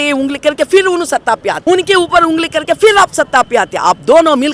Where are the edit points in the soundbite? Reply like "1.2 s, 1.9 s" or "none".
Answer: 1.5 s